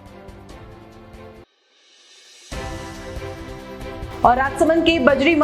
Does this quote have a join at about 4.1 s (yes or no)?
yes